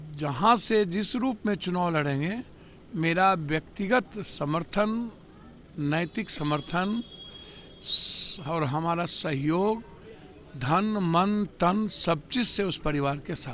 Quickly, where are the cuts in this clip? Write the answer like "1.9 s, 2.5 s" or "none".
none